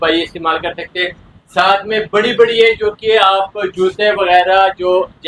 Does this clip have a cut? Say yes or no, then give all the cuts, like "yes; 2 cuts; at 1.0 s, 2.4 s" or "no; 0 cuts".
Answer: no; 0 cuts